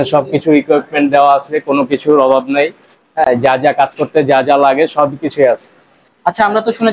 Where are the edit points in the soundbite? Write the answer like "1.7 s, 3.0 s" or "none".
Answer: none